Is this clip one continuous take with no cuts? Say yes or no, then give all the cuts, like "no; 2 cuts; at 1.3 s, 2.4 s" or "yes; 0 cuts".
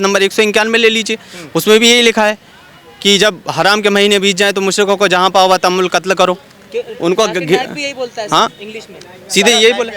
yes; 0 cuts